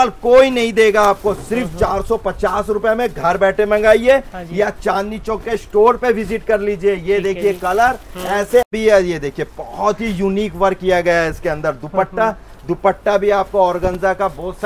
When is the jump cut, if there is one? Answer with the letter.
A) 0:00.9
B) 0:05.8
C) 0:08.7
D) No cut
C